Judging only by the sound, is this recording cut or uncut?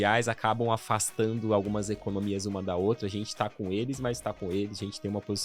uncut